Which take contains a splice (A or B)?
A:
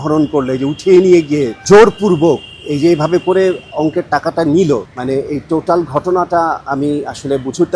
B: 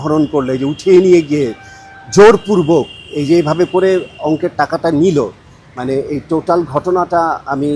A